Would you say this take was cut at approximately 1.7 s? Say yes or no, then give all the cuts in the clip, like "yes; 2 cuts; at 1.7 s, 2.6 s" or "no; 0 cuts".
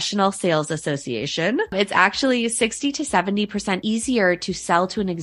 yes; 2 cuts; at 1.7 s, 3.8 s